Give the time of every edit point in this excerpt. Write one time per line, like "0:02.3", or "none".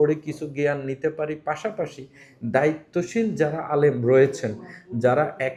none